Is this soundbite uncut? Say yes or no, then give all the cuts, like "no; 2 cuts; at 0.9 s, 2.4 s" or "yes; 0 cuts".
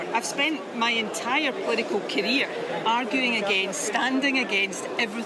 yes; 0 cuts